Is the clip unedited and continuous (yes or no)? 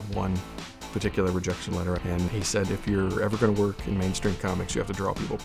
no